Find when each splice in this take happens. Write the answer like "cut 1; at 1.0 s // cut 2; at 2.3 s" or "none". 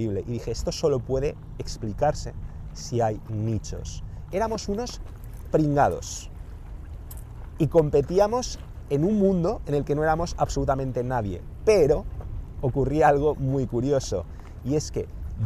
cut 1; at 3.7 s